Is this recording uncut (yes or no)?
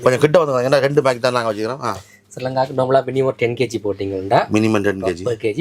yes